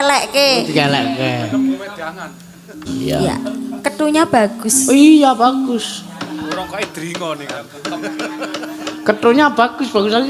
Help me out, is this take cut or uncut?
cut